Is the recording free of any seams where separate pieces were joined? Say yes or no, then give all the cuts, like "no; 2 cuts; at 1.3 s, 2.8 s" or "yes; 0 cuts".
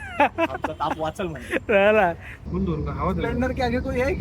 no; 1 cut; at 2.3 s